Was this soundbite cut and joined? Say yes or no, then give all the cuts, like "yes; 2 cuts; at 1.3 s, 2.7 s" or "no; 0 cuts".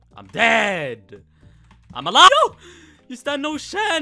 yes; 1 cut; at 2.3 s